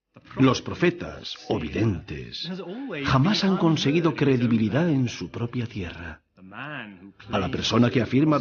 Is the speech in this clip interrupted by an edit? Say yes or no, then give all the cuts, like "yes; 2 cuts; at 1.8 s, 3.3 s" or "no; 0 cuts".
no; 0 cuts